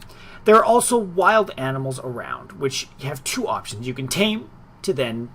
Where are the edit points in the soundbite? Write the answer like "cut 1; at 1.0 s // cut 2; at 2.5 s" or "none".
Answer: none